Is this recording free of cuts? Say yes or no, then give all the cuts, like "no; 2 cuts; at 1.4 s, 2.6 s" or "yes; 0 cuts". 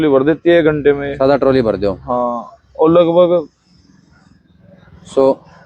yes; 0 cuts